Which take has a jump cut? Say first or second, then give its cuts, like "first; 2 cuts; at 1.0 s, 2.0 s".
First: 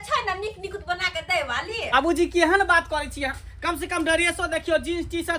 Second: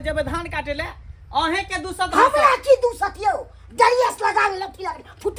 first; 1 cut; at 2.3 s